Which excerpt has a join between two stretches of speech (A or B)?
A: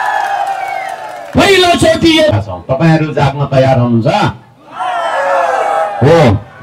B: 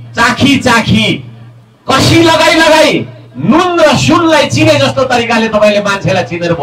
A